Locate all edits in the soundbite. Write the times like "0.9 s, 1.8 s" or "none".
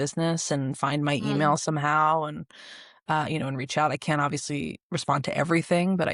none